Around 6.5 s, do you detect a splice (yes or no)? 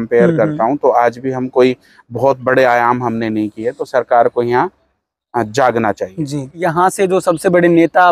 yes